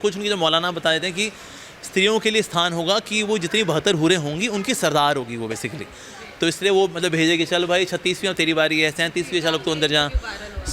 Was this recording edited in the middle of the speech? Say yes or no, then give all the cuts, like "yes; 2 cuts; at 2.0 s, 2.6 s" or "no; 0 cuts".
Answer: no; 0 cuts